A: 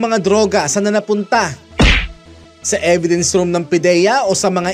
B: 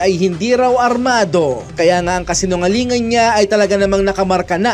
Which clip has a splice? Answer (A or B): B